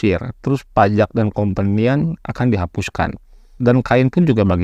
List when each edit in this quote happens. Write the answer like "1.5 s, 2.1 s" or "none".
3.4 s